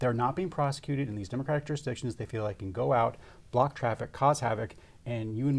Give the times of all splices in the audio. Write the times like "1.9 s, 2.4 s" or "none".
none